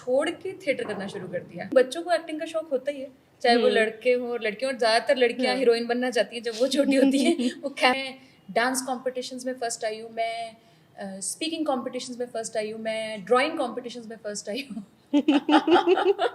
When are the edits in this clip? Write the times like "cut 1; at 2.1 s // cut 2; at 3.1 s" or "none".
cut 1; at 1.7 s // cut 2; at 7.9 s